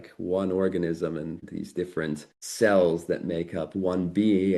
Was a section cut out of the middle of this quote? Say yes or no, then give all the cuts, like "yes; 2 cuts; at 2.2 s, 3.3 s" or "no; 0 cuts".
yes; 2 cuts; at 1.5 s, 2.4 s